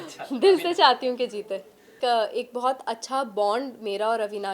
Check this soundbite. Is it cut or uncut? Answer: cut